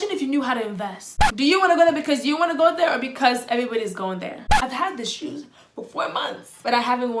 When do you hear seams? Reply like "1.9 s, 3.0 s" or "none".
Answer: 1.2 s, 4.4 s